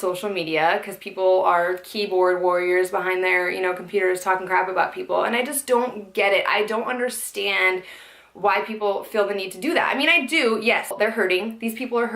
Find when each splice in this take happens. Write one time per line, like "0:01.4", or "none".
0:05.9

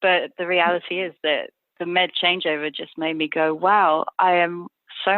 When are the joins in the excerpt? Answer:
none

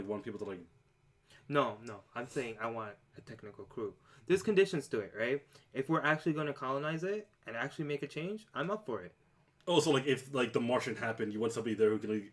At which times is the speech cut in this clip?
0:02.2

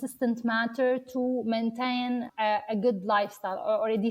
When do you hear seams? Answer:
0:02.4

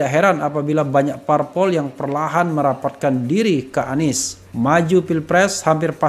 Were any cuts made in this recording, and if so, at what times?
none

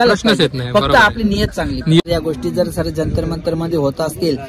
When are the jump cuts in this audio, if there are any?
0:02.0

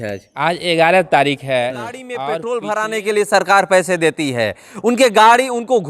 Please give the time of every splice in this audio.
0:02.1

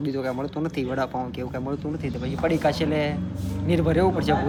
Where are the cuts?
none

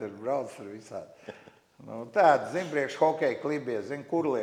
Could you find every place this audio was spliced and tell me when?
none

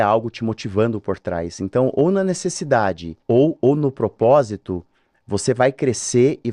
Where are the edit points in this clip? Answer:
0:03.1

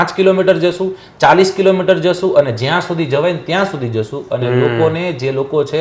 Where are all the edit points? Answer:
none

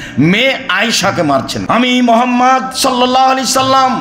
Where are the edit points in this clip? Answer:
0:01.8

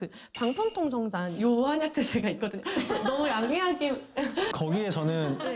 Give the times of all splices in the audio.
0:04.5

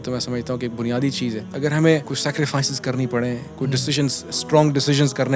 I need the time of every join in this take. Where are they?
0:01.5
0:02.1

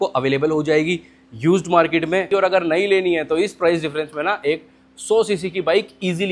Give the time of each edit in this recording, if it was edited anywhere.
0:02.3

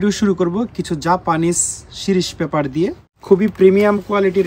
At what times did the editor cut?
0:03.1

